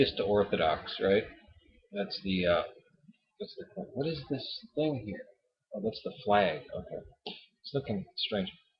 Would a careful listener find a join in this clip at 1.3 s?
no; 1 cut; at 4.5 s

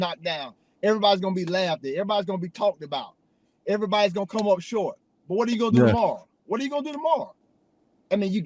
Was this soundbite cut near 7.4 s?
yes; 1 cut; at 7.4 s

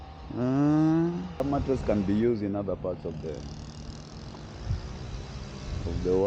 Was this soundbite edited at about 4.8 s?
no; 1 cut; at 1.4 s

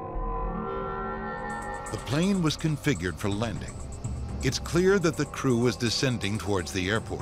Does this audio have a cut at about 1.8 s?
yes; 1 cut; at 1.8 s

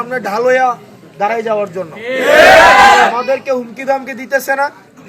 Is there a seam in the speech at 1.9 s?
no; 0 cuts

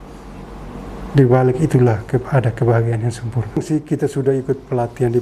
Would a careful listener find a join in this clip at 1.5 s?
no; 1 cut; at 3.6 s

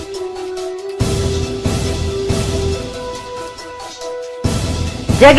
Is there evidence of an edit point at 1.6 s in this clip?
no; 1 cut; at 3.1 s

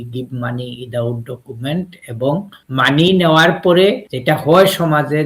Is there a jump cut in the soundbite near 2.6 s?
yes; 2 cuts; at 2.6 s, 4.1 s

